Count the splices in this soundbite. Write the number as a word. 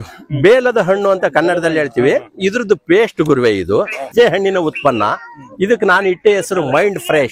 one